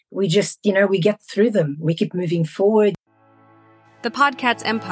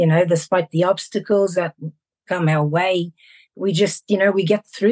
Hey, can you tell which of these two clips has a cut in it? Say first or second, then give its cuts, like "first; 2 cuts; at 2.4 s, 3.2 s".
first; 1 cut; at 3.0 s